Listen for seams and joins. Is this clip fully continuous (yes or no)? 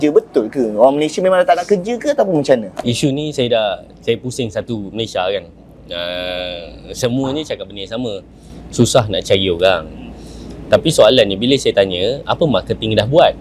no